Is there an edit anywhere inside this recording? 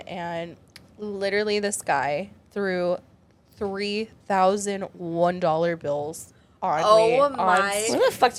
no; 0 cuts

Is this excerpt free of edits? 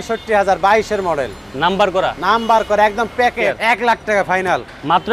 no; 1 cut; at 3.3 s

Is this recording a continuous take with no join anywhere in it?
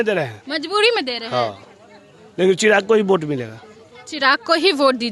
yes; 0 cuts

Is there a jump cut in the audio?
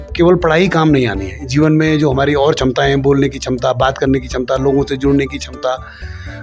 no; 0 cuts

